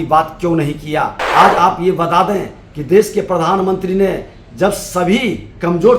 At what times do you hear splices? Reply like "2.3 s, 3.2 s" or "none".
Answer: 1.2 s